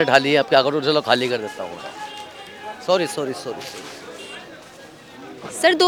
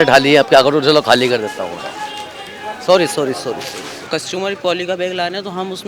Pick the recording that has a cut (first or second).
second